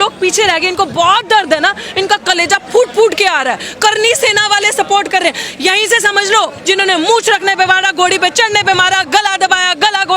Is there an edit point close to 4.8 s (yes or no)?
no